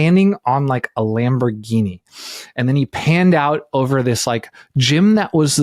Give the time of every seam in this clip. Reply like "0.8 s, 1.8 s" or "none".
none